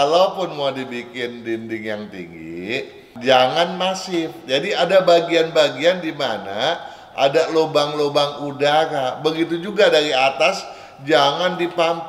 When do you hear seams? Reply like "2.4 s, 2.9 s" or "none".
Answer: none